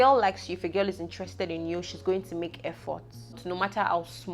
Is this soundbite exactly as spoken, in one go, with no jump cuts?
no; 1 cut; at 3.4 s

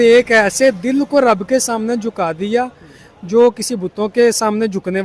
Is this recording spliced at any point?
no; 0 cuts

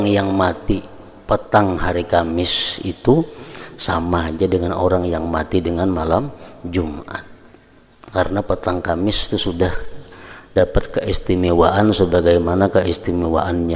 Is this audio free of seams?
yes; 0 cuts

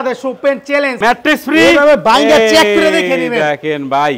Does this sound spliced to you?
yes; 1 cut; at 1.0 s

